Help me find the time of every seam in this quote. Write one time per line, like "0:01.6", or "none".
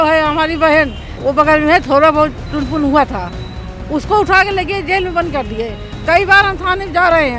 0:01.0